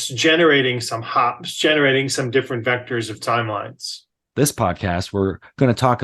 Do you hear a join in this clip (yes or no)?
yes